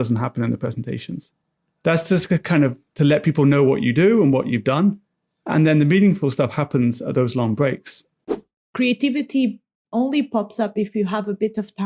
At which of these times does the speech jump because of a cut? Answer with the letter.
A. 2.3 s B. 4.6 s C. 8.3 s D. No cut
C